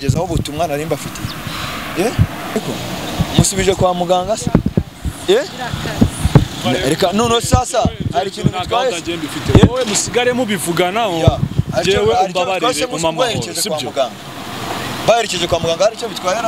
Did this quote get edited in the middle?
yes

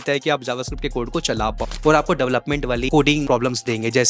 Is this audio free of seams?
no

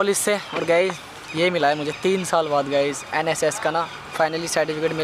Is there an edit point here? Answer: no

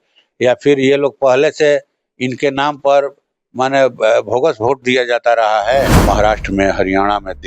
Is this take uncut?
no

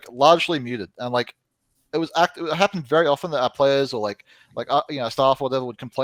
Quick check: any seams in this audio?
no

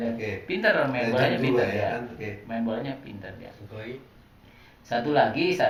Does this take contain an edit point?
no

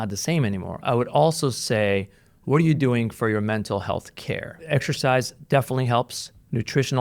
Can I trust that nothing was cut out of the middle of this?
no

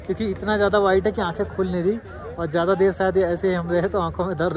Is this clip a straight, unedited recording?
yes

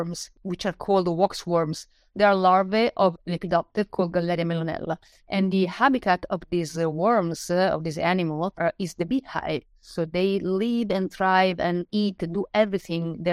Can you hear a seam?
no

